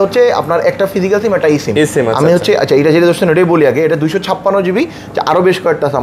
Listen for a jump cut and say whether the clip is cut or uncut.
uncut